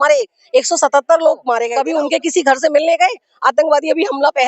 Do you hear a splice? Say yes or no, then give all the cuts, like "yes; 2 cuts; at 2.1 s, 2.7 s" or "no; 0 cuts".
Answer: yes; 1 cut; at 1.7 s